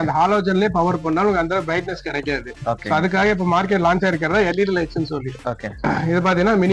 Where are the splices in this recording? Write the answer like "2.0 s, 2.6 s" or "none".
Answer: none